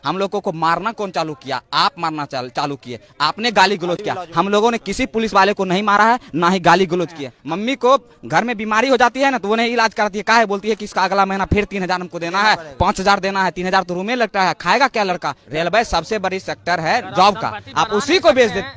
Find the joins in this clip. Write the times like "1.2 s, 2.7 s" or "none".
7.3 s, 15.4 s